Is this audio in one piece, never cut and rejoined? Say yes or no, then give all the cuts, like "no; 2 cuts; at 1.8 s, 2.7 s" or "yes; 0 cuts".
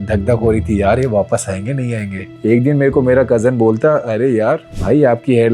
no; 1 cut; at 2.3 s